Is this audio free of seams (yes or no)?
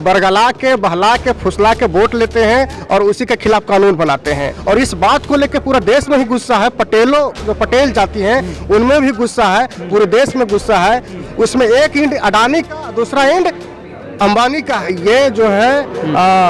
no